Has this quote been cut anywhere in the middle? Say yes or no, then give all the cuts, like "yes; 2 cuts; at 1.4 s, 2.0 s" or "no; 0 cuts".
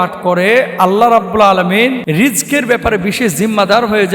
yes; 1 cut; at 2.0 s